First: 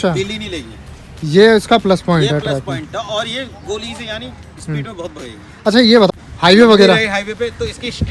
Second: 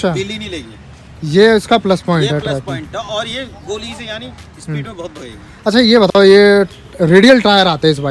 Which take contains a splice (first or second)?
first